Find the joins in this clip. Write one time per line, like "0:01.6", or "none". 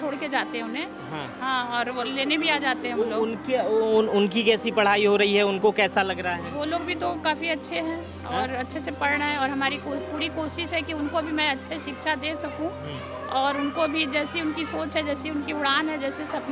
none